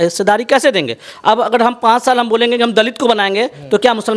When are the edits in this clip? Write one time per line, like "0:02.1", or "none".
none